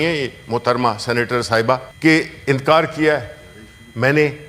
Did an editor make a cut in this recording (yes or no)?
yes